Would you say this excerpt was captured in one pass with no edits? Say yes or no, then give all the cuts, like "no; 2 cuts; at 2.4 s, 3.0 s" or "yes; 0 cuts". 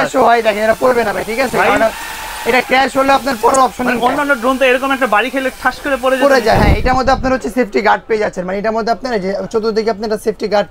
yes; 0 cuts